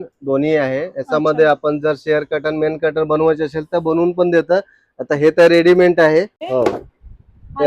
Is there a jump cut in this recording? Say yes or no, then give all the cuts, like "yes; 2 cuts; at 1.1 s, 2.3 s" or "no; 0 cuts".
yes; 1 cut; at 6.4 s